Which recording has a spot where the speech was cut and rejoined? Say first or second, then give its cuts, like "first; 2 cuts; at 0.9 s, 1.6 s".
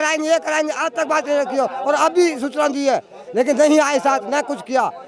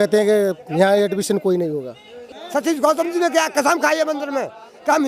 second; 1 cut; at 2.3 s